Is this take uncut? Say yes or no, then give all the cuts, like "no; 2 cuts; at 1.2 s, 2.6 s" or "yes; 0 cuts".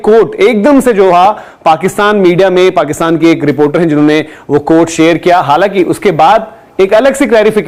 yes; 0 cuts